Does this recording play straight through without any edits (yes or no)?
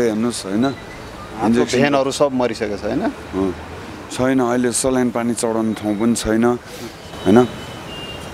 yes